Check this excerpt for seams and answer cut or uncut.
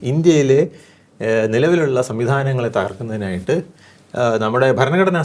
uncut